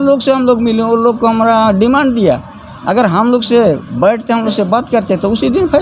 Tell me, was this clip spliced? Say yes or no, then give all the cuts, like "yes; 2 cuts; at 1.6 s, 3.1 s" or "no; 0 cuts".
no; 0 cuts